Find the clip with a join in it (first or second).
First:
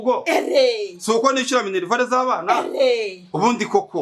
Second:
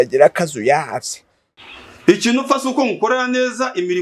second